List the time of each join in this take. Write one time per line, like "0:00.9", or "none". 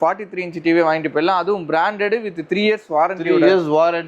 none